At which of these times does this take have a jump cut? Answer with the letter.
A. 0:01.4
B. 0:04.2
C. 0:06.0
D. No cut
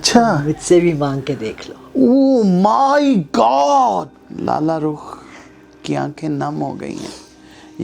B